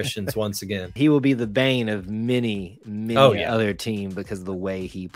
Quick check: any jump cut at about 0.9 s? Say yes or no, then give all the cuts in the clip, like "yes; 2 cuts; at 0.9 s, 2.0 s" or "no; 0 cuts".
yes; 1 cut; at 0.9 s